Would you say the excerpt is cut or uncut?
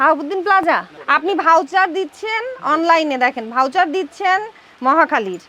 cut